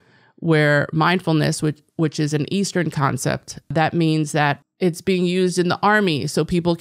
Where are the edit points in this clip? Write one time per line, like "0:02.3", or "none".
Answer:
0:03.7
0:04.7